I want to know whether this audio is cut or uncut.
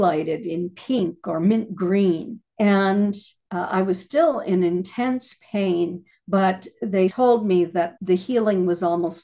cut